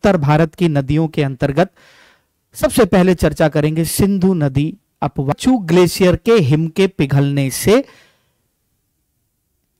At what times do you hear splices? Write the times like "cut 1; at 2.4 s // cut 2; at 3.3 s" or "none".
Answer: cut 1; at 5.3 s